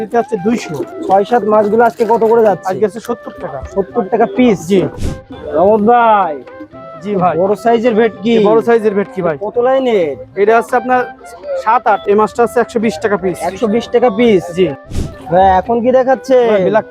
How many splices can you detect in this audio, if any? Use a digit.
4